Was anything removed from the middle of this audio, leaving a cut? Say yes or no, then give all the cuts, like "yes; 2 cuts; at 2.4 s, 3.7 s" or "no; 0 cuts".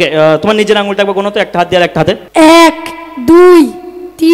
yes; 1 cut; at 2.2 s